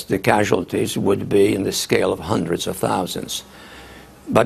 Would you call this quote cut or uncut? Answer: uncut